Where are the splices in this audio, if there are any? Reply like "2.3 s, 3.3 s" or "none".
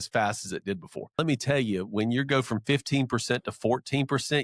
1.2 s

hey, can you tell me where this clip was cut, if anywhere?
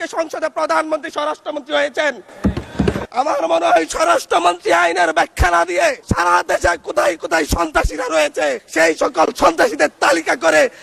3.1 s, 6.0 s, 8.6 s

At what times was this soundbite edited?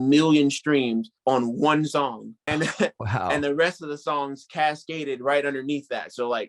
1.1 s, 2.3 s

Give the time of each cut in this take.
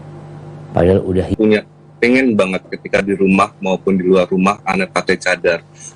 1.3 s

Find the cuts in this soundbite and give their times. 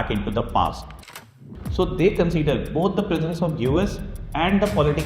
1.3 s

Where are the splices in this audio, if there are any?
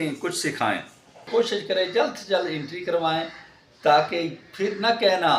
1.2 s

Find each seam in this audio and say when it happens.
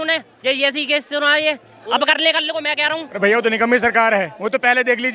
3.1 s

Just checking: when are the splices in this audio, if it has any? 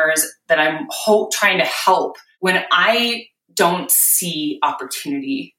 2.2 s

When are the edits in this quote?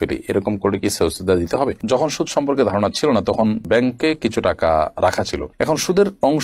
1.8 s

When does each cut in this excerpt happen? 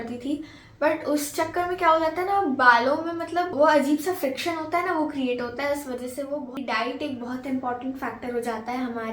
3.5 s, 6.6 s

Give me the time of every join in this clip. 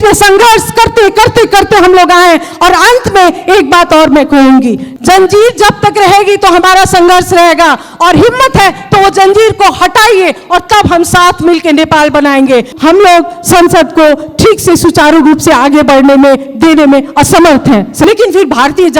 4.8 s, 12.7 s, 18.0 s

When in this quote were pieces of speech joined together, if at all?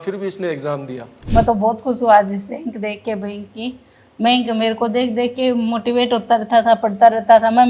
1.1 s

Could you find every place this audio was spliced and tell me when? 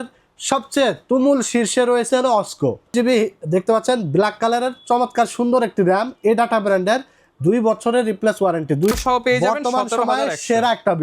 2.9 s, 8.9 s

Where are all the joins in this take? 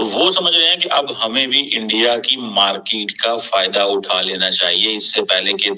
none

